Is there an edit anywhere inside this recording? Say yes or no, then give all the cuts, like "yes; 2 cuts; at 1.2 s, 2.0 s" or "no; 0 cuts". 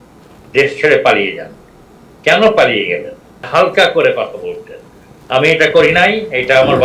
yes; 1 cut; at 3.5 s